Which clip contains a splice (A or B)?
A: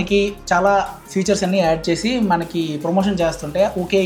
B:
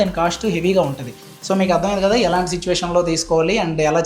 B